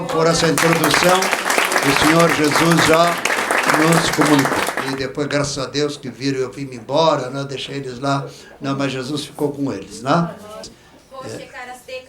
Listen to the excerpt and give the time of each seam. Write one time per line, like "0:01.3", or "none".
0:04.8